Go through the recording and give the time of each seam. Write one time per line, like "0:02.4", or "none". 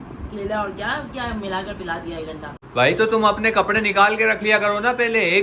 0:02.5